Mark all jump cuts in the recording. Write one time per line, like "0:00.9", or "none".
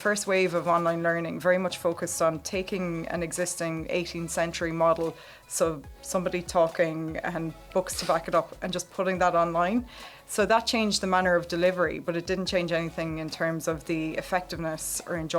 none